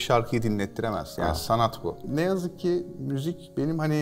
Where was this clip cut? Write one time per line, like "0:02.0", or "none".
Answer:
0:02.0

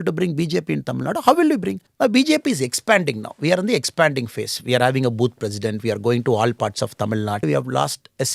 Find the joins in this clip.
0:01.8
0:07.4

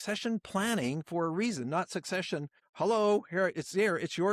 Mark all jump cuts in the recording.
0:02.6

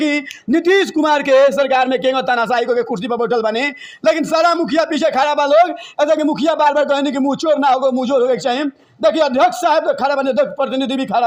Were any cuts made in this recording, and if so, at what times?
none

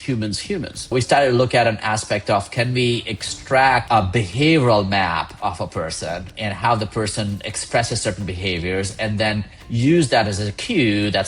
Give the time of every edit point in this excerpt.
0:00.9
0:03.8

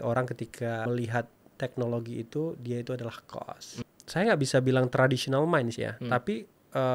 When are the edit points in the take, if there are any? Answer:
0:00.9
0:03.8

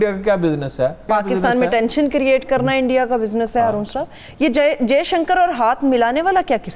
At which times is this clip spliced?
0:01.1

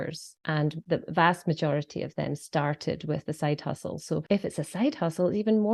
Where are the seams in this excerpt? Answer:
0:00.7
0:04.2

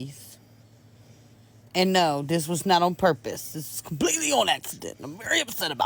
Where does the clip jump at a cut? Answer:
none

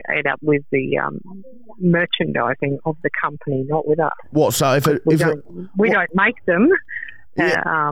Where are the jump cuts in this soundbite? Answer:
none

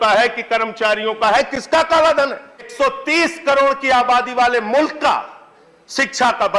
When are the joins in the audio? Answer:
0:02.7

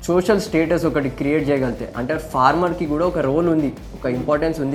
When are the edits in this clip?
none

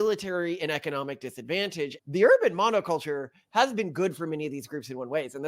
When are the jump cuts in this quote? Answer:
0:02.0

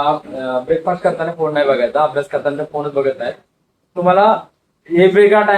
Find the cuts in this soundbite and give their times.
none

